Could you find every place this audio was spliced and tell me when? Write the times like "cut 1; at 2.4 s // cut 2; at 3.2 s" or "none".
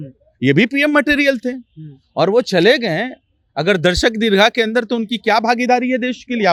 none